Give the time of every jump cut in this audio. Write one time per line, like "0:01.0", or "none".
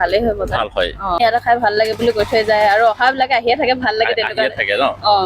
0:01.1